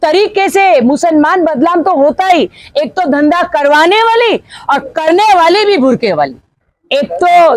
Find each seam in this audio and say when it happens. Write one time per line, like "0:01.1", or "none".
none